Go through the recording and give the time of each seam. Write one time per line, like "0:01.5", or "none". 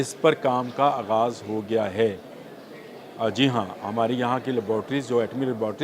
none